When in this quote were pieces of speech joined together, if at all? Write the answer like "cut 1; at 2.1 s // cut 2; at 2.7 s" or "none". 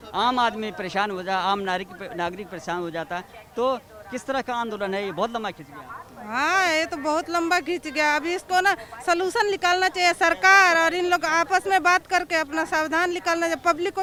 none

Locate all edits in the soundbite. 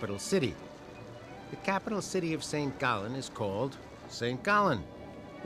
none

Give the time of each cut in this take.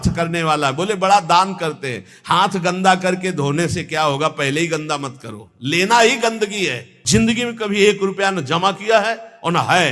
cut 1; at 6.9 s

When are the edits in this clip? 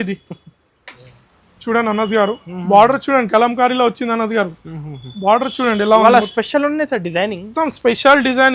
cut 1; at 0.9 s

